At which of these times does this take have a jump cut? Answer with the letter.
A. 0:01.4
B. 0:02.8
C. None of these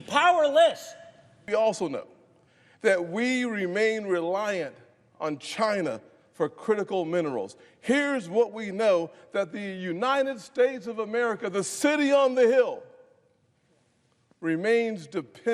A